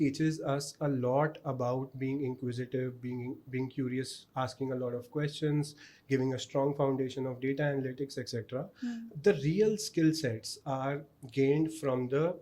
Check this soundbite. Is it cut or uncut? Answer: uncut